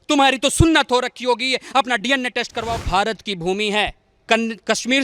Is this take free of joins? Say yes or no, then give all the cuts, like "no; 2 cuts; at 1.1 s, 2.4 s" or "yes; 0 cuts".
no; 1 cut; at 2.8 s